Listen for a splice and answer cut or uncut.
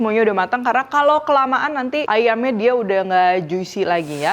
uncut